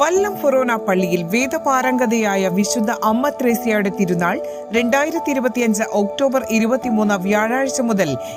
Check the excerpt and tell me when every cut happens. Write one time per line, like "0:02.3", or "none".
none